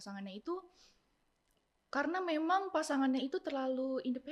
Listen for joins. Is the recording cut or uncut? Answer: uncut